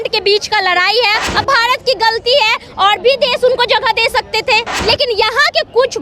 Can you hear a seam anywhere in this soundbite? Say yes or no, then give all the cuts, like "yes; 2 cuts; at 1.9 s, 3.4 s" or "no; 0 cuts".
yes; 2 cuts; at 1.3 s, 4.7 s